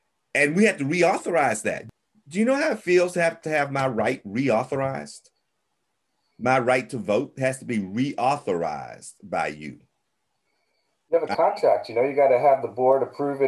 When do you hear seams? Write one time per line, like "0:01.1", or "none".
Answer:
0:01.8
0:03.4